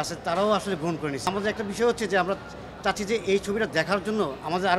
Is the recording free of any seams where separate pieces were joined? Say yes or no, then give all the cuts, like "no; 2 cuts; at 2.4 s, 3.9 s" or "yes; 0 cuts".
no; 1 cut; at 1.3 s